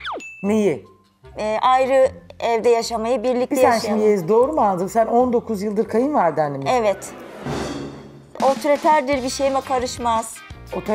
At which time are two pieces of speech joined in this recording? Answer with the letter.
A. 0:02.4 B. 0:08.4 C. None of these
B